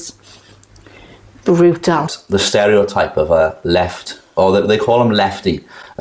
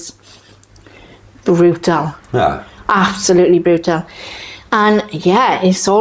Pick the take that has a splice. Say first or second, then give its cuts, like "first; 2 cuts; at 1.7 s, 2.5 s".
first; 1 cut; at 2.2 s